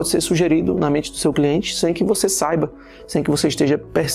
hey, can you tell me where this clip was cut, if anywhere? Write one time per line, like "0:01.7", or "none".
none